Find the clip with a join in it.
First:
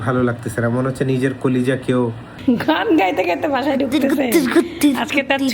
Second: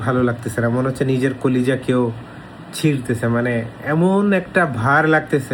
first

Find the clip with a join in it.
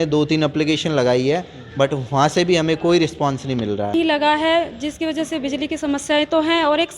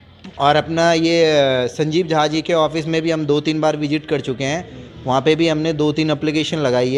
first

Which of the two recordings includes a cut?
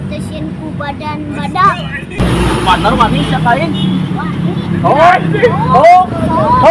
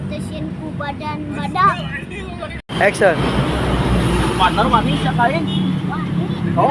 first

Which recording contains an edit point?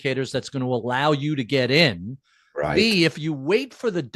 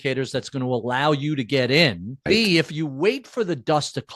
second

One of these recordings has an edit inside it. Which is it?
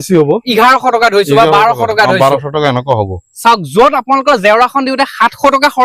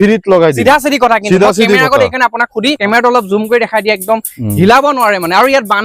second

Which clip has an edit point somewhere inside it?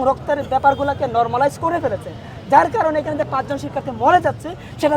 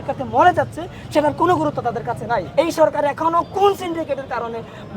second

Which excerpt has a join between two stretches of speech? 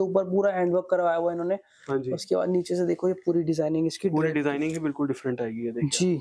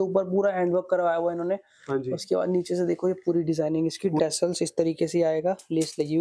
second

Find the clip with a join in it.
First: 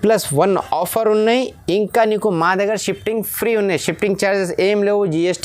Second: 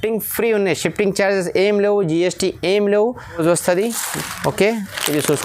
second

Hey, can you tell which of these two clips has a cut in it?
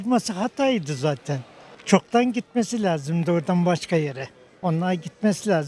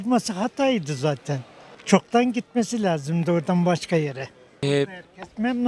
first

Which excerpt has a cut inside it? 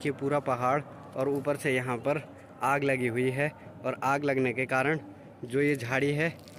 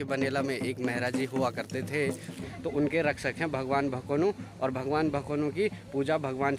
second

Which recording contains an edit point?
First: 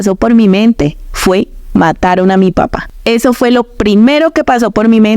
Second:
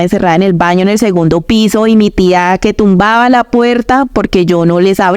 first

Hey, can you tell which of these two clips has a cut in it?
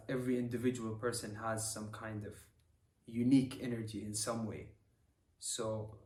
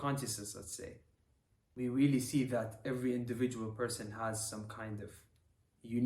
second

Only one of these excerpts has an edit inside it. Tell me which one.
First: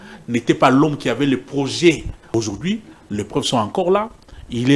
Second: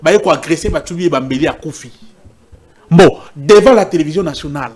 first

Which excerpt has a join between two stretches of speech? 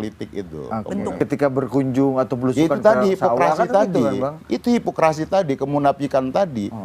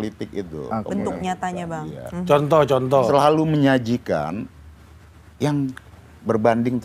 first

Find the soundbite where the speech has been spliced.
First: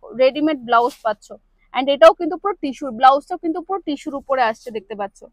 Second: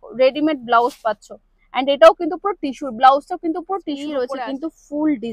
second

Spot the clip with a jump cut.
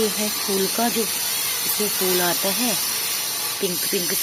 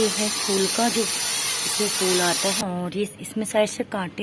second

